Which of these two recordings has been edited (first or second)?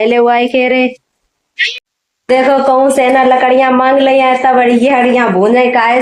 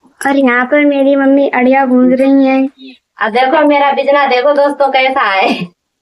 first